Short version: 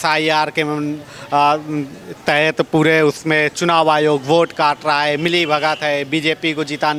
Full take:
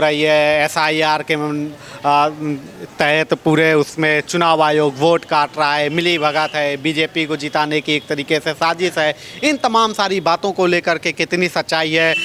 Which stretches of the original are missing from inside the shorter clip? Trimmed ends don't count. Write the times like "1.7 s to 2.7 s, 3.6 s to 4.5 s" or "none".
none